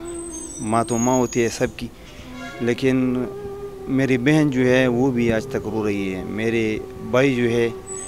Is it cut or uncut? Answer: uncut